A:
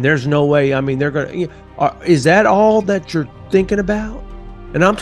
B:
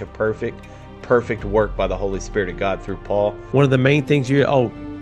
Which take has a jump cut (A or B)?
B